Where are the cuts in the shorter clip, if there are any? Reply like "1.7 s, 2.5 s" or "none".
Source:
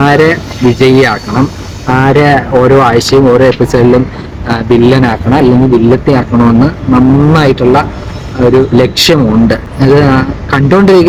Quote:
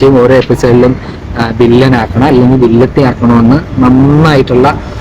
none